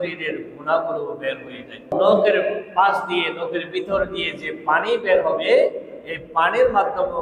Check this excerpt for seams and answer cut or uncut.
cut